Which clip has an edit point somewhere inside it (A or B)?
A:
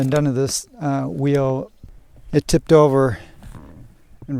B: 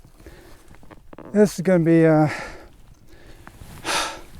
A